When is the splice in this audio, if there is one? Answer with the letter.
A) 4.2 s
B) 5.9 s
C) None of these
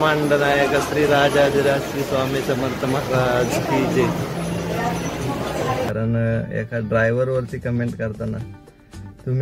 B